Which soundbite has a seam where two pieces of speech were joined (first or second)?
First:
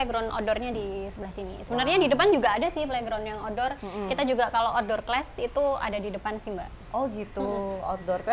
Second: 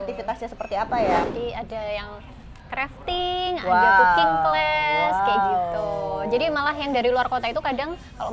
second